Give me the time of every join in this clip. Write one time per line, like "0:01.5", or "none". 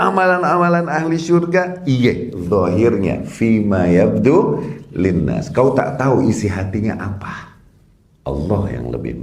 none